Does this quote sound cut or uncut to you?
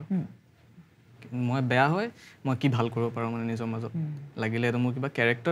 uncut